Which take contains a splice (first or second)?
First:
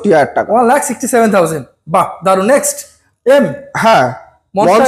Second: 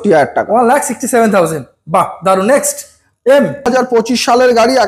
second